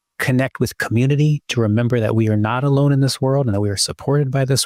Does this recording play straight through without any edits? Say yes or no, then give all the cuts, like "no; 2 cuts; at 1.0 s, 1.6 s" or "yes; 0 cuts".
yes; 0 cuts